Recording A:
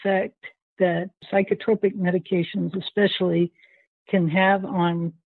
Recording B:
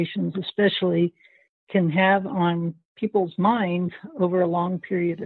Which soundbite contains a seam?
A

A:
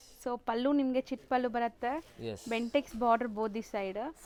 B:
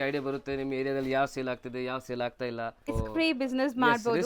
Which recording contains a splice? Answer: B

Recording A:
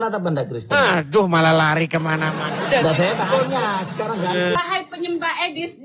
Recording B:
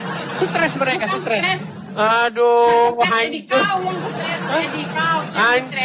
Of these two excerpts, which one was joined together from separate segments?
A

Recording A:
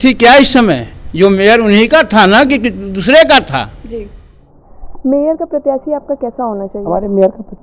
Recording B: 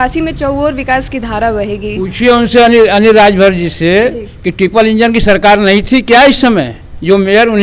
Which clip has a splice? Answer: A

